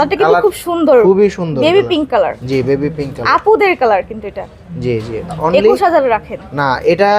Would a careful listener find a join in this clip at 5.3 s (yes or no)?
yes